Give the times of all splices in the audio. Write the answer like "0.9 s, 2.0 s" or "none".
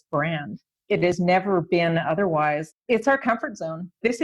2.7 s